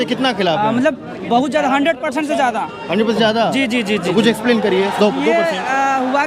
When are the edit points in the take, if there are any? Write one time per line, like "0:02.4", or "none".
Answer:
none